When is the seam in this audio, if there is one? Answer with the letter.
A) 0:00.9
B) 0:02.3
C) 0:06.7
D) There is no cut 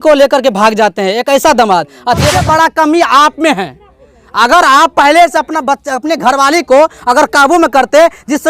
B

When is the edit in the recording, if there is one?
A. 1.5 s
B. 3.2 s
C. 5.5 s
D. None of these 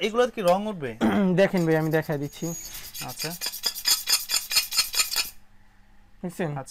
D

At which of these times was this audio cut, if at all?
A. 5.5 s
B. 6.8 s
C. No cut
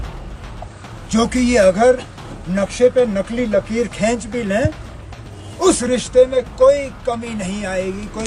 C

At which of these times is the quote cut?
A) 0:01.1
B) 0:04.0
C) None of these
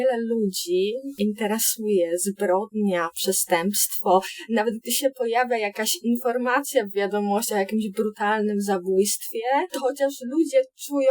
A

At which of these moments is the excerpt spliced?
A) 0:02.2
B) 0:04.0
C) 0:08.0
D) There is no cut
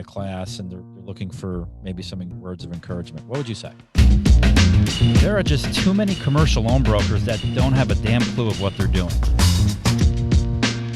B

